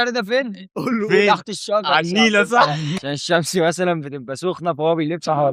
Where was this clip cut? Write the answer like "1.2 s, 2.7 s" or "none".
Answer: 3.0 s